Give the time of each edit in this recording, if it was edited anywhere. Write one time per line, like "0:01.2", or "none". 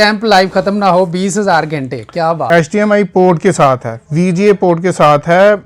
0:02.4